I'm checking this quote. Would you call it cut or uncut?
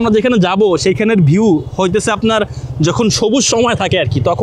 uncut